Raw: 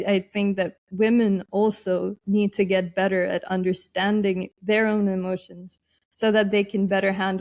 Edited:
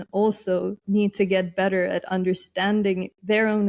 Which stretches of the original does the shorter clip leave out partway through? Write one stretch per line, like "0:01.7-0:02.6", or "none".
none